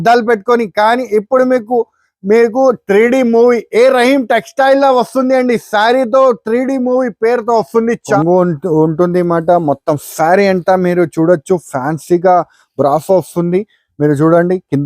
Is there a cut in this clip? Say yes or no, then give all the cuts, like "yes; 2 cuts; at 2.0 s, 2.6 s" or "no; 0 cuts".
yes; 1 cut; at 8.0 s